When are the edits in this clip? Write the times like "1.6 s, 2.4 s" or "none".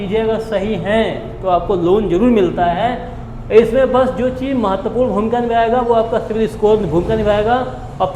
none